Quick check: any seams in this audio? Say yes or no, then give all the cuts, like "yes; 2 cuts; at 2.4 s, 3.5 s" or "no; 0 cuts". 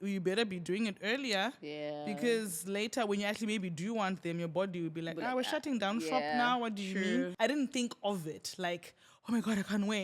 yes; 1 cut; at 7.3 s